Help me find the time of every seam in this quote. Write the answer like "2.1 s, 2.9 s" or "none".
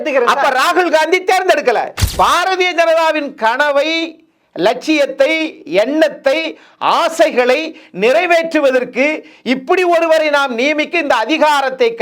2.0 s